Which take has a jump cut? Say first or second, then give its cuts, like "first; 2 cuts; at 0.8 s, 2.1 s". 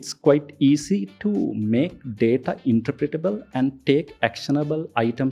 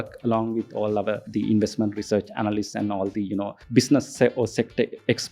second; 2 cuts; at 1.2 s, 3.6 s